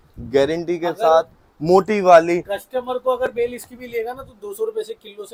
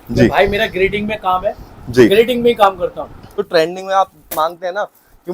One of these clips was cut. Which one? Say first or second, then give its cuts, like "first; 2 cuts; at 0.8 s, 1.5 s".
second; 1 cut; at 3.4 s